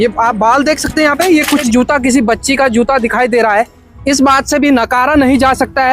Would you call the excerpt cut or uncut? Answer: cut